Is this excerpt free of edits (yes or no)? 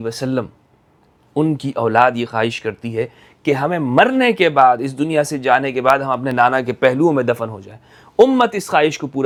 yes